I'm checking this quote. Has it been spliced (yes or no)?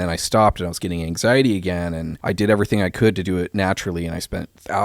yes